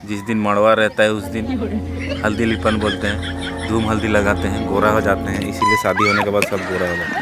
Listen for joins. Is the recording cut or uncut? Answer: uncut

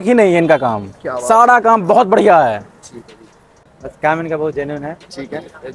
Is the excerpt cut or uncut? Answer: cut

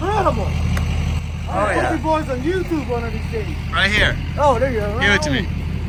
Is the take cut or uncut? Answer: uncut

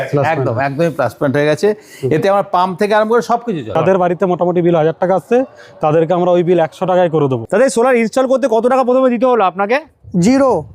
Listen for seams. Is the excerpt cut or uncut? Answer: cut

